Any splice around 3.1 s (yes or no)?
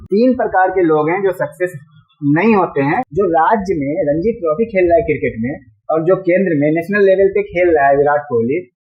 yes